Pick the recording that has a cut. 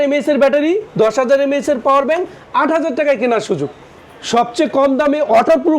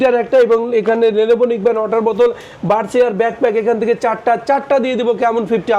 first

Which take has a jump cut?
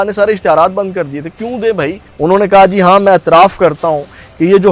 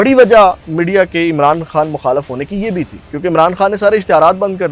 first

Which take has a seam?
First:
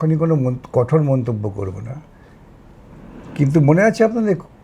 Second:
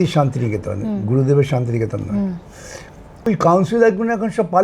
second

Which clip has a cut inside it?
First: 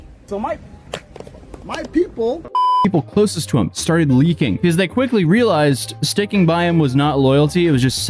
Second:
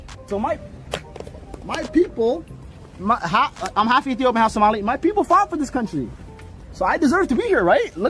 first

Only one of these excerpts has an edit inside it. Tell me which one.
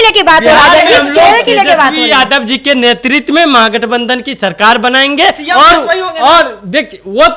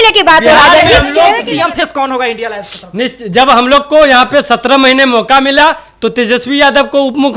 second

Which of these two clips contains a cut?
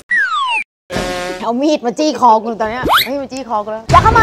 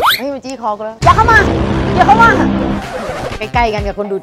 first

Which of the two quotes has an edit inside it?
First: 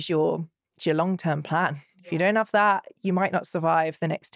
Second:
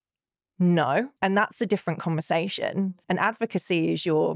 second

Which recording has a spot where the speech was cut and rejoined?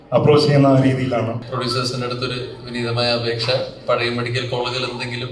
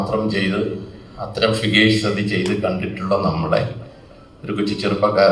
first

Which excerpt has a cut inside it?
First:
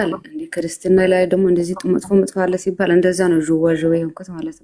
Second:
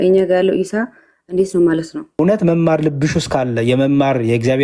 second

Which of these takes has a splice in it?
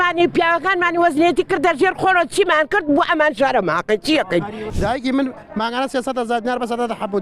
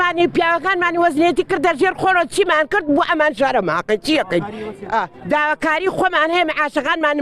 first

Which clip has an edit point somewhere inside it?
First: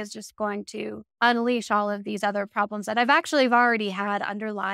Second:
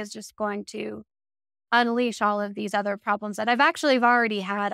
first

